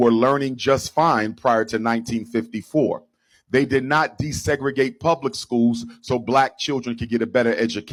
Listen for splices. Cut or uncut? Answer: uncut